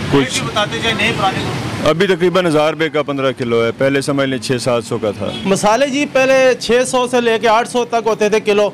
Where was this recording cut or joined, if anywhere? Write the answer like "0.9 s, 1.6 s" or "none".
5.3 s